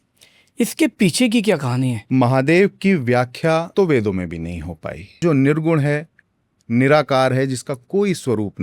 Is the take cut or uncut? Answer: cut